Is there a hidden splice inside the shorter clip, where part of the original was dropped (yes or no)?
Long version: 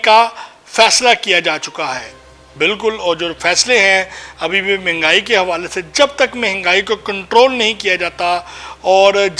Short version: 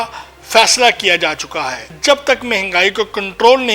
yes